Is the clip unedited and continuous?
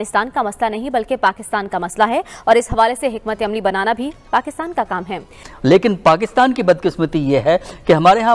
no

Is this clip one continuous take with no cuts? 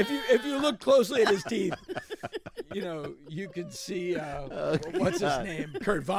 yes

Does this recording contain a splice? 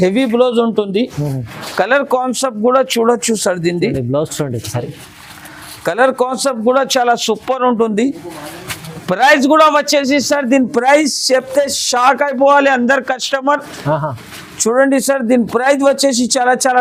no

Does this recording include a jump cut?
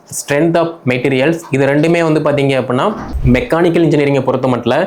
yes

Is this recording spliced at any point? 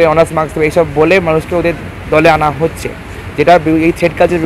no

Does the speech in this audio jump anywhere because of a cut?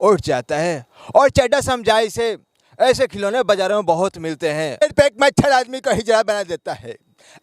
yes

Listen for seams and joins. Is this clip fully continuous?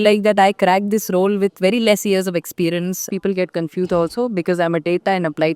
no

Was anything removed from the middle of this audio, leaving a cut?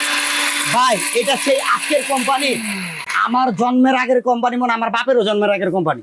no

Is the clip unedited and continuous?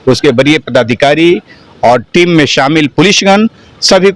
yes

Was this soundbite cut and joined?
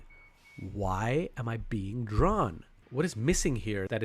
yes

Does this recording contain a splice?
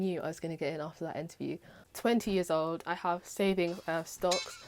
yes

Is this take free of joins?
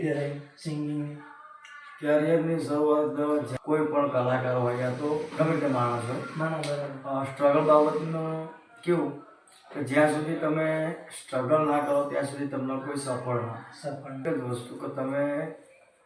no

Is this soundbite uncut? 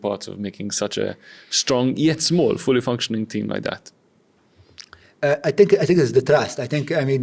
yes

